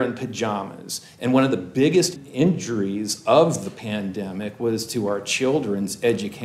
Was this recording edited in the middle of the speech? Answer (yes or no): yes